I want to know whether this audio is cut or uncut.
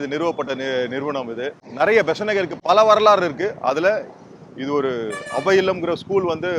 cut